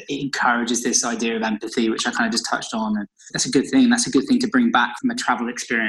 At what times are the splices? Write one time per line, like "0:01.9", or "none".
0:04.9